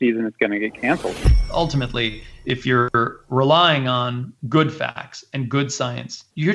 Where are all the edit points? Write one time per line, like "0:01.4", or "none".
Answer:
0:01.3

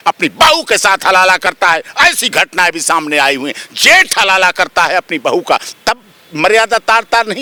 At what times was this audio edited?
none

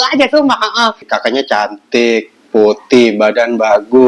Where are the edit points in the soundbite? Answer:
0:01.0

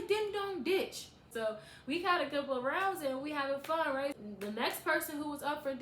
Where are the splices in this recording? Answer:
0:01.3
0:04.2

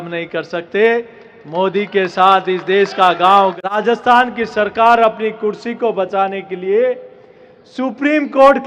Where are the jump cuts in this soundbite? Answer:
0:03.8

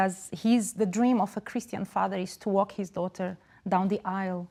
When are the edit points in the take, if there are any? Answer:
none

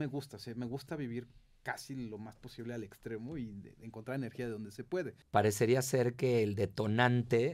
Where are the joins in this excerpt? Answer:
0:05.2

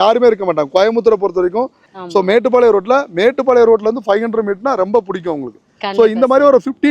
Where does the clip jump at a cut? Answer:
0:01.8

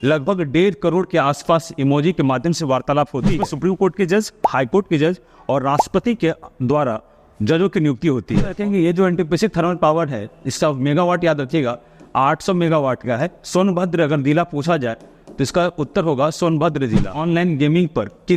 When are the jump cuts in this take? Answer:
0:03.4
0:08.5
0:17.1

